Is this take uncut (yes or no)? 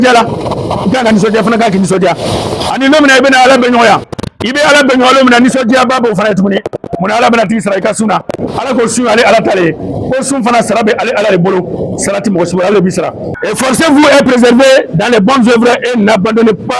no